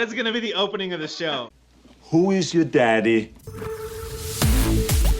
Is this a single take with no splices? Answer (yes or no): no